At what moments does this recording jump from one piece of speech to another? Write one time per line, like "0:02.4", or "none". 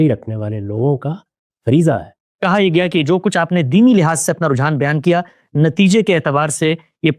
0:02.2